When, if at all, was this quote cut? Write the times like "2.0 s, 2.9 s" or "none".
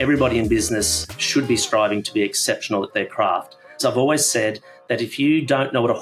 3.8 s